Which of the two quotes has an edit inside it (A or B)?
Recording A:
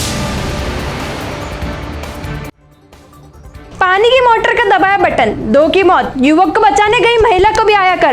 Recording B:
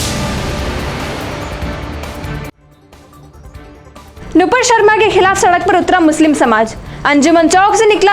B